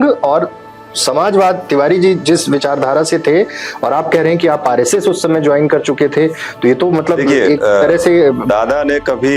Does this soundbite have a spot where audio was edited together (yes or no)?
no